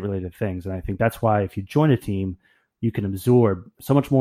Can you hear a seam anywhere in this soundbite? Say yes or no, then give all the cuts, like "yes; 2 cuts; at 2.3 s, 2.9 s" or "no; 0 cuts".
no; 0 cuts